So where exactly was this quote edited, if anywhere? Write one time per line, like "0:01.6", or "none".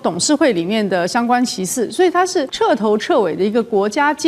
0:02.5